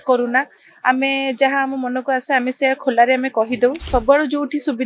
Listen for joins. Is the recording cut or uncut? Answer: cut